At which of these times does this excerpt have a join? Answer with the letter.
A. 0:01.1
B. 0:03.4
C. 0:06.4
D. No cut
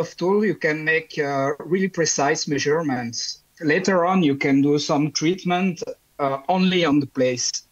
B